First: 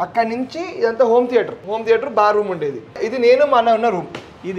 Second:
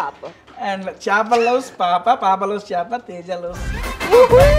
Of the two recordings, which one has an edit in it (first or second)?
first